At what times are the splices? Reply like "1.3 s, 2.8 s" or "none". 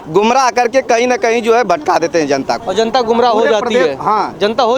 none